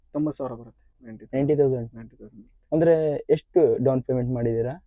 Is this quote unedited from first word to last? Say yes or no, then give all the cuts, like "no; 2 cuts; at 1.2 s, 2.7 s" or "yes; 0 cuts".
yes; 0 cuts